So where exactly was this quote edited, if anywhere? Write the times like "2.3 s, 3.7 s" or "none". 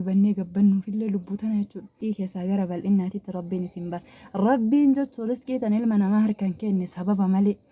2.0 s